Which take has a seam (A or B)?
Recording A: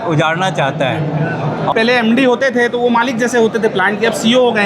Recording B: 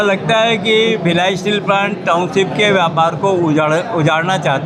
A